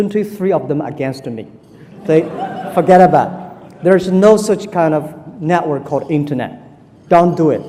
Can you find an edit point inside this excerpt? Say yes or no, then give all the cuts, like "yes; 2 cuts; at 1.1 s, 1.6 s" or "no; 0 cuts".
no; 0 cuts